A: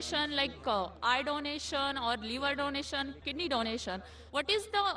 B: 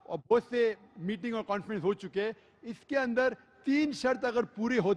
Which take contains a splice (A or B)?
A